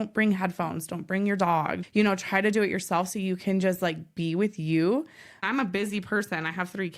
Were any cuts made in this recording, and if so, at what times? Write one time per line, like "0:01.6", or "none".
0:01.8
0:05.5